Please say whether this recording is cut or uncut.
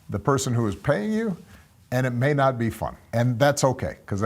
cut